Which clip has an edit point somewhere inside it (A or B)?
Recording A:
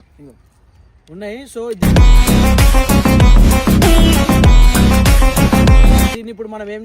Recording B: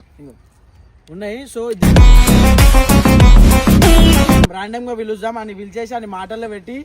B